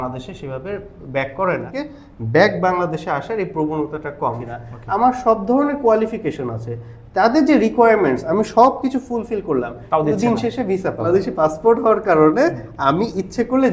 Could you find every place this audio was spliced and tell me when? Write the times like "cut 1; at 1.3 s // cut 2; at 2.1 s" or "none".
cut 1; at 1.7 s // cut 2; at 4.4 s // cut 3; at 11.1 s